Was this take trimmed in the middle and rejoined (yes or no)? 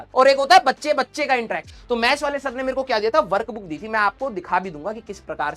yes